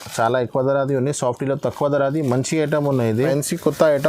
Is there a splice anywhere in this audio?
yes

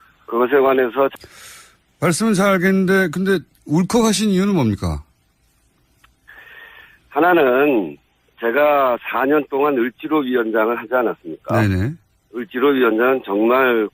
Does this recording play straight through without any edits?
yes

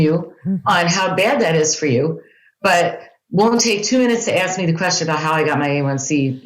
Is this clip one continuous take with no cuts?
yes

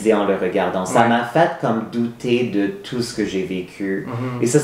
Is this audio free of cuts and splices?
yes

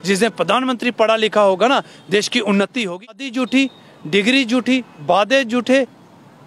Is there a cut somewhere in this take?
yes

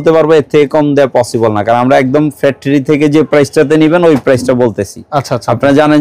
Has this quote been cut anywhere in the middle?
no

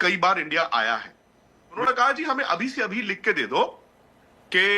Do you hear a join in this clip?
yes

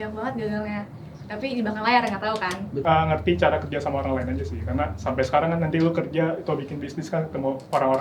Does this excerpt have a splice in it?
yes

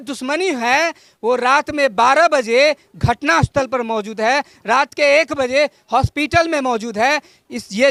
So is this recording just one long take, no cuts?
yes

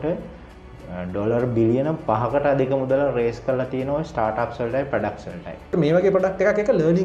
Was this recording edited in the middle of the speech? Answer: yes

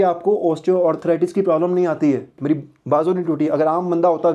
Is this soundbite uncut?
no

